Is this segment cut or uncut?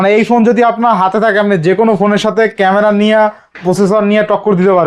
uncut